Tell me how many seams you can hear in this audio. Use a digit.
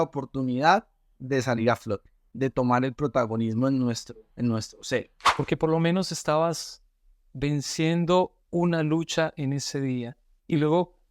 2